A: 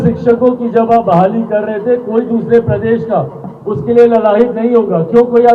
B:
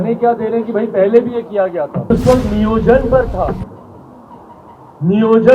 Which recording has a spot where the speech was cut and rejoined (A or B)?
B